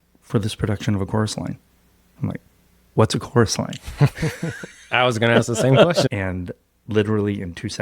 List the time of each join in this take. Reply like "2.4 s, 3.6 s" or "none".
6.1 s